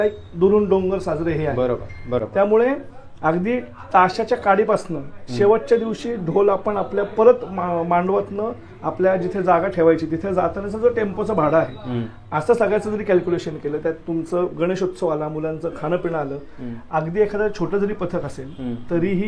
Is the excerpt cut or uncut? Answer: cut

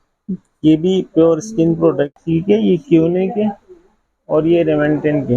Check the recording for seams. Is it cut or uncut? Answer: cut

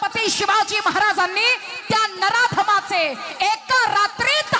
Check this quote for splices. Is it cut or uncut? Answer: uncut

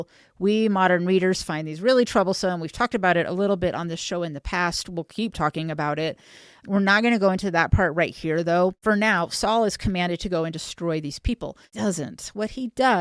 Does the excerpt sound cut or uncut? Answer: cut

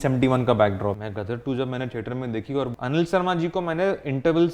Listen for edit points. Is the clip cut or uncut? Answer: cut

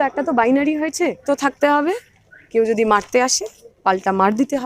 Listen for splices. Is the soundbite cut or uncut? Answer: cut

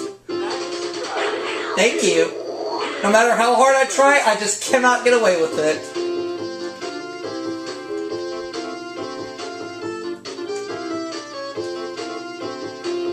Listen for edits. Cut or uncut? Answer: uncut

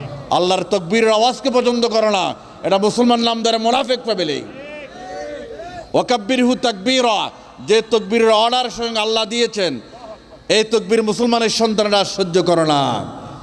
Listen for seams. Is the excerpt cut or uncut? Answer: uncut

